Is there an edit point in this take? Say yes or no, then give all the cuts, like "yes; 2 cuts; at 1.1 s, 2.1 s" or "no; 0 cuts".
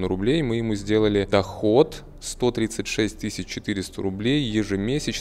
no; 0 cuts